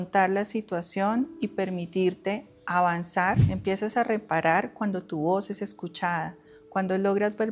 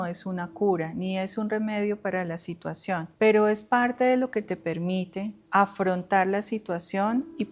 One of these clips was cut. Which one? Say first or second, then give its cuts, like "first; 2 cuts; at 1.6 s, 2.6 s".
first; 1 cut; at 3.4 s